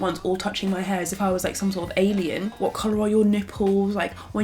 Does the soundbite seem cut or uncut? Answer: cut